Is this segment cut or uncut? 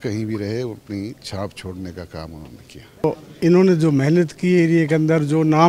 cut